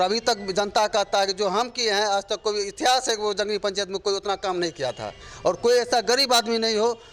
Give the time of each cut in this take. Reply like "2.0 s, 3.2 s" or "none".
none